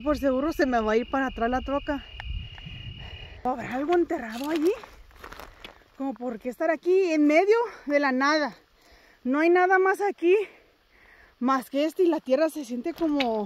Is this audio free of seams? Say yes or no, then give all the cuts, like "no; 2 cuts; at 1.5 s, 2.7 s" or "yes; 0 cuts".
no; 1 cut; at 3.4 s